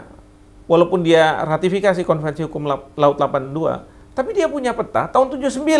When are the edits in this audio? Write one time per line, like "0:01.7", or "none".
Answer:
0:03.9

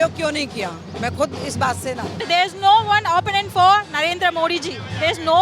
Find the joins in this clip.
0:02.2

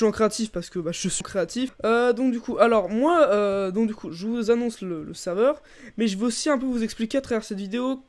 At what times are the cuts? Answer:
0:01.2

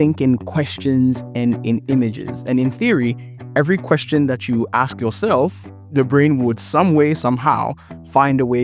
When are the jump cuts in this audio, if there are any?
none

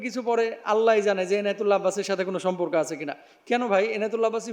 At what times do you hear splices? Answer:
none

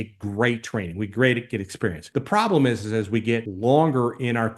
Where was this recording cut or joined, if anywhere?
0:02.0
0:03.5

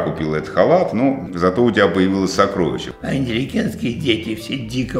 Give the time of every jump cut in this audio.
0:01.3
0:02.9

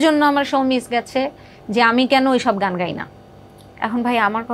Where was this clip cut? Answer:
none

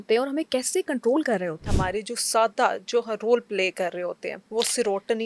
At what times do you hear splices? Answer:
0:01.7
0:04.3

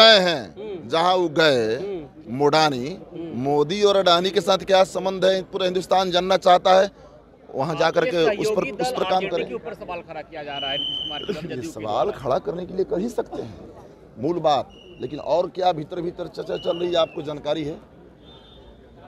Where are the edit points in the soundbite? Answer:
none

